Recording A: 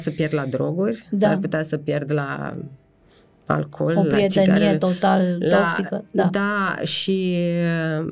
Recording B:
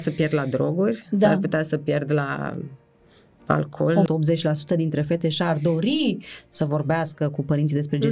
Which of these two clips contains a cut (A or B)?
B